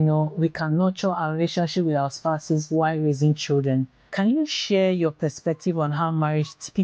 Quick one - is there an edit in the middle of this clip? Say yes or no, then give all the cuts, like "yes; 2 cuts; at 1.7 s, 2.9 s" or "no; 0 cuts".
yes; 1 cut; at 4.0 s